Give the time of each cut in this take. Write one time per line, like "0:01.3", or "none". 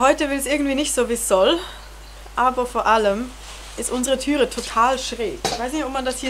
0:02.2